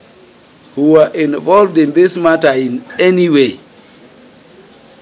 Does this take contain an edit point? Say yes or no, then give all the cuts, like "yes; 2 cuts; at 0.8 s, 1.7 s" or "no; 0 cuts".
no; 0 cuts